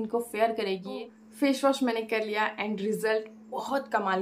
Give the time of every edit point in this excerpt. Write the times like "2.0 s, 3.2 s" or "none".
1.0 s